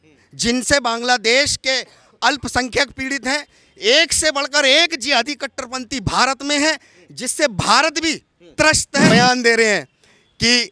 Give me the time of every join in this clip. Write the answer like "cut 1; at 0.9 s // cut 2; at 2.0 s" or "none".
cut 1; at 9.1 s